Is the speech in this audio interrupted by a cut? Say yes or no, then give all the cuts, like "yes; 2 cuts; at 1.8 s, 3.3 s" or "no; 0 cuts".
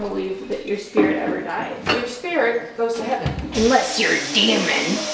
no; 0 cuts